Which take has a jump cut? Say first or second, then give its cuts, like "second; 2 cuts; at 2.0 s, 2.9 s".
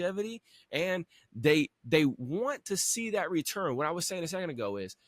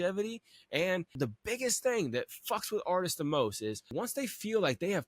second; 2 cuts; at 1.2 s, 3.9 s